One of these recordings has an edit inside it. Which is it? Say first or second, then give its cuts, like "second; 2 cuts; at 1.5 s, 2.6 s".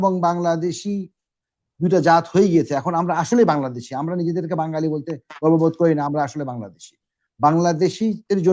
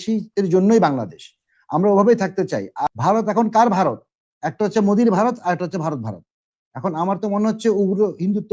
second; 1 cut; at 2.9 s